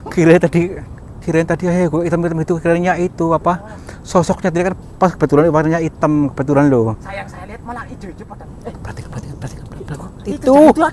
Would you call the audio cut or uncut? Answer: cut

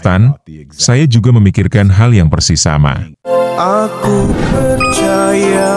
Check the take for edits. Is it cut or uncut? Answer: cut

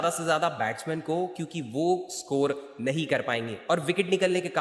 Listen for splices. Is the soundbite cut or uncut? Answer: cut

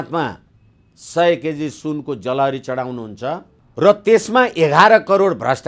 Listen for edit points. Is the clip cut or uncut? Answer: cut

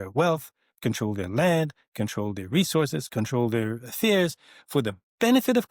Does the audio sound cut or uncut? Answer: uncut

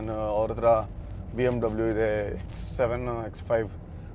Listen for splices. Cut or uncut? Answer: uncut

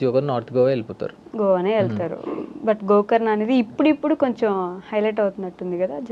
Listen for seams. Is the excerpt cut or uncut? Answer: uncut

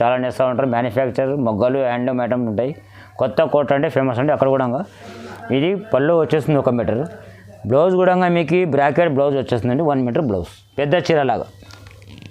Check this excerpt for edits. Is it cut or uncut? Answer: uncut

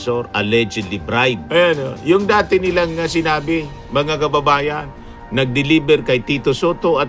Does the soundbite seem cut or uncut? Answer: cut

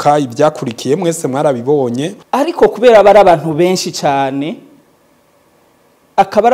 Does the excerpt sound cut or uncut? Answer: cut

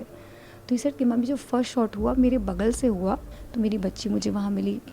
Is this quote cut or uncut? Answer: cut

